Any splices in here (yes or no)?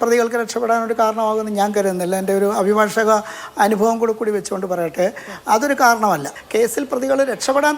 yes